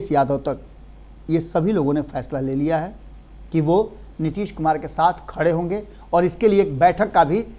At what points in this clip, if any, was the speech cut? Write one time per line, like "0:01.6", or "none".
none